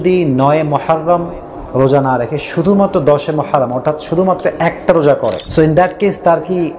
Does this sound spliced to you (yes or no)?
yes